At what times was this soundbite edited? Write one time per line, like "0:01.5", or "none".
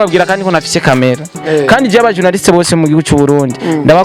0:01.3

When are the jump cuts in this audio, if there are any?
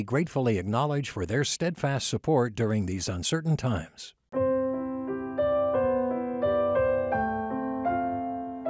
0:04.2

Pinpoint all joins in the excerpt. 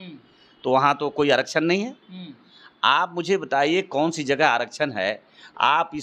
none

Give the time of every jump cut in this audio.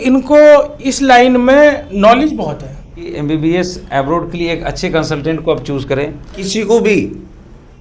0:03.1
0:06.5

